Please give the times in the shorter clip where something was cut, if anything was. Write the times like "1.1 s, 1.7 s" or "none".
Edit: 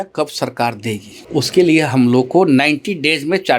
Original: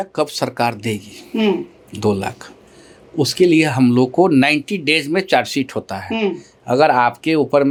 1.1 s